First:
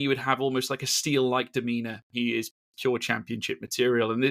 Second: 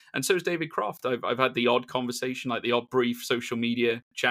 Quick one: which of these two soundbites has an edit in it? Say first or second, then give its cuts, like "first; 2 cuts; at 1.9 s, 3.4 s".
first; 1 cut; at 2.1 s